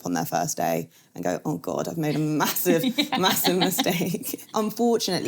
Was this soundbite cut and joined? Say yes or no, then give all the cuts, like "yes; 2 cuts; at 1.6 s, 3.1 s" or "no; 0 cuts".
yes; 1 cut; at 4.4 s